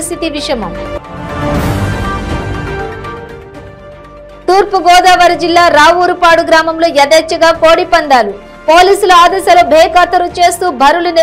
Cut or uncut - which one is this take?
uncut